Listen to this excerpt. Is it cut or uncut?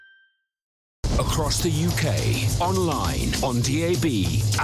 cut